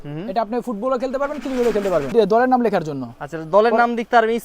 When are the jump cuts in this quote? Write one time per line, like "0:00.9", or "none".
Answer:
0:02.1

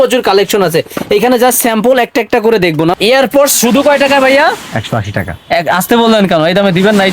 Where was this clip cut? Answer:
0:03.0

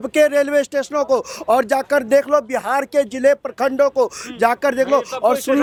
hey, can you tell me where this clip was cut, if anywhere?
none

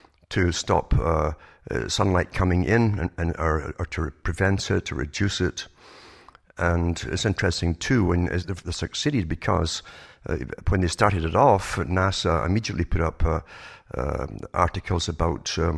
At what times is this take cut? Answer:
0:01.5

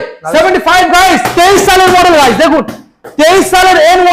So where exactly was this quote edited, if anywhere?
none

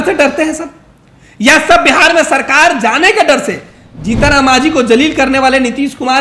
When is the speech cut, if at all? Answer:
none

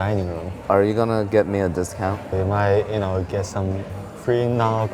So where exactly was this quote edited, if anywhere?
0:00.7
0:02.2
0:04.1

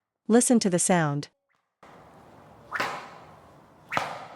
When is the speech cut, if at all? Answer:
0:01.8

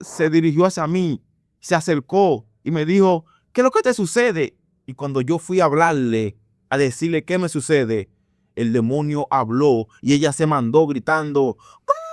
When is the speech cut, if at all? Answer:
none

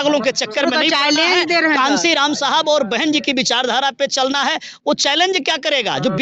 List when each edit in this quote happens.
none

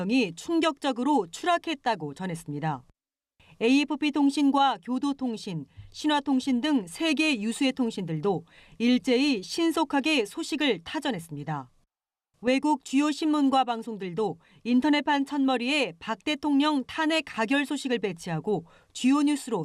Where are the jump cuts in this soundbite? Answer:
none

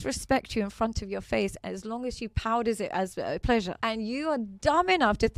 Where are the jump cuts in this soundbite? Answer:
0:03.7

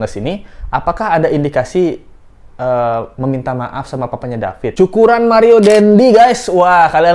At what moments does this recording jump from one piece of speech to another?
0:04.7

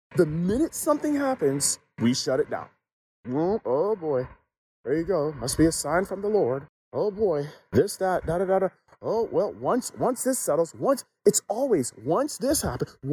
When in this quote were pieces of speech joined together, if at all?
0:06.8

